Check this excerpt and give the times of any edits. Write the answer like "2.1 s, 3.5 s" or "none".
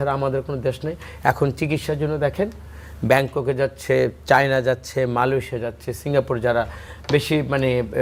none

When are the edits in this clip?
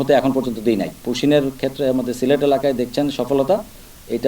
1.0 s

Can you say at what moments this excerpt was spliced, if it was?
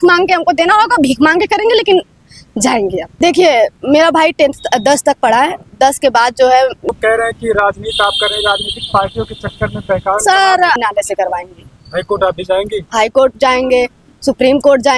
3.1 s, 6.9 s, 10.8 s

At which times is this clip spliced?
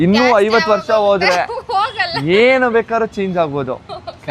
none

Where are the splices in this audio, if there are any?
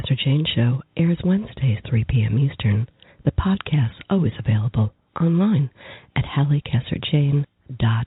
none

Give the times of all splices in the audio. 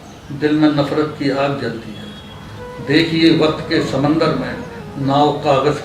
none

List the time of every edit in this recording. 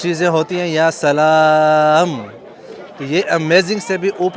none

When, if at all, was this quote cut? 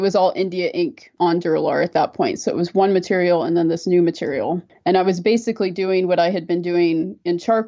none

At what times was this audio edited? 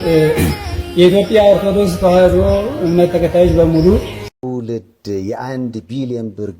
4.4 s

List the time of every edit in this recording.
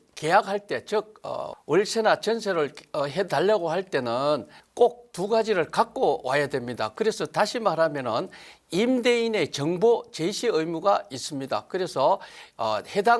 1.5 s, 4.6 s

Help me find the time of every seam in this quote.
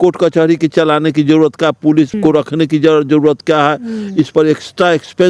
2.1 s

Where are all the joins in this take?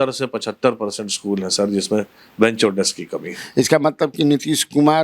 3.4 s

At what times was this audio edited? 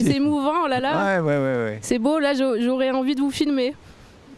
none

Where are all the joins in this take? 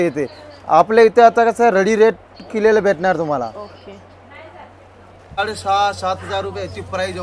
5.4 s

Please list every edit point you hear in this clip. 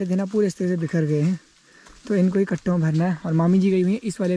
none

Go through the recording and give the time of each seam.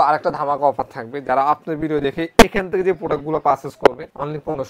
none

